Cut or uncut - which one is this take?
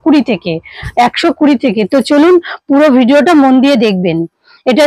uncut